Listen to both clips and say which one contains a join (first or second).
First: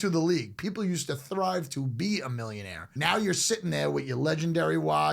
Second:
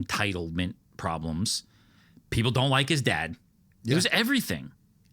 first